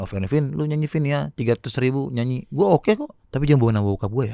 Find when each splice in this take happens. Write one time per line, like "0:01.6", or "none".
0:03.2